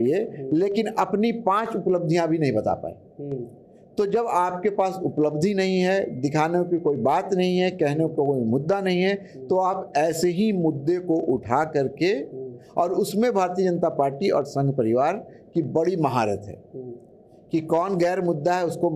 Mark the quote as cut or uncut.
uncut